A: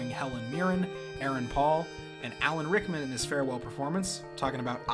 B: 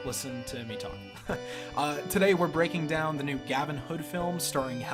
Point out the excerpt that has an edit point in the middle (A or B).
A